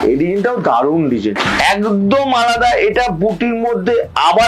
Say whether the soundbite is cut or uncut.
cut